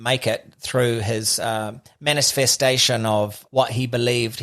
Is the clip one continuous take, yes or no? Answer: no